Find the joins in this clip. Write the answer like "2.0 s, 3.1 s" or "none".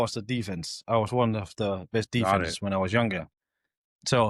none